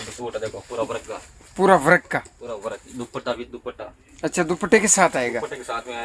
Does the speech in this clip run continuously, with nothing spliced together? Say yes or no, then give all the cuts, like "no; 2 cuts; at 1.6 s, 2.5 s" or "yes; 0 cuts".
yes; 0 cuts